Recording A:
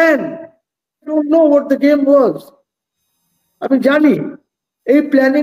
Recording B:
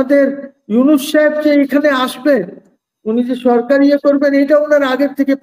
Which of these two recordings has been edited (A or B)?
A